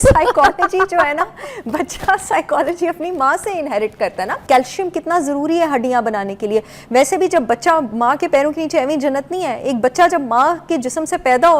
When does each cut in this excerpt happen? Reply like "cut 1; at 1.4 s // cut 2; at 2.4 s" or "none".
cut 1; at 4.4 s

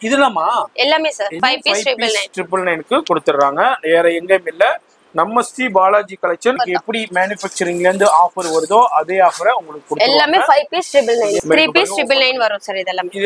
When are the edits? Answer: cut 1; at 1.3 s // cut 2; at 6.6 s // cut 3; at 11.4 s

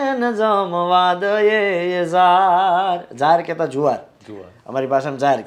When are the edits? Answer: none

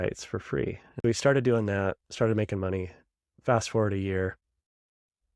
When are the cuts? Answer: cut 1; at 1.0 s

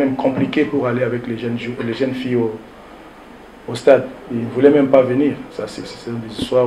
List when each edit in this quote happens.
none

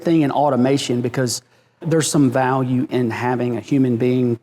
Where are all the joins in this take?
cut 1; at 1.8 s

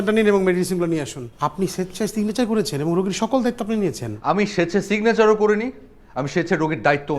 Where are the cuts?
cut 1; at 1.2 s // cut 2; at 4.1 s

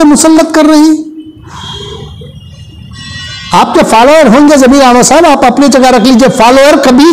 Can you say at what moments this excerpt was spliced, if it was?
cut 1; at 1.4 s

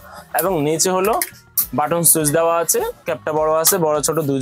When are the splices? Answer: none

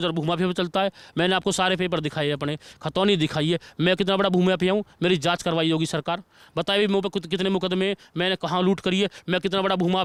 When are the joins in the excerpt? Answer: none

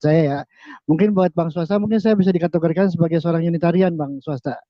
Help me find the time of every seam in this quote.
none

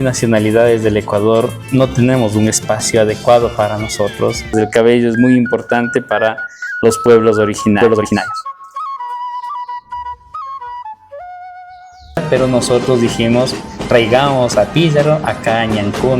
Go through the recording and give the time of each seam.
cut 1; at 4.5 s // cut 2; at 12.2 s

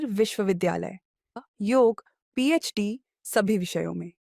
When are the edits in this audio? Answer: cut 1; at 1.4 s

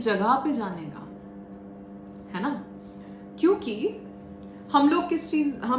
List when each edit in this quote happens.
none

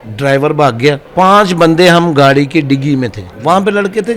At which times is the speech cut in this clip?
cut 1; at 1.0 s // cut 2; at 3.3 s

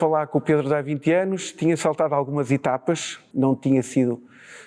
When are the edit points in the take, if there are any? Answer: cut 1; at 3.2 s

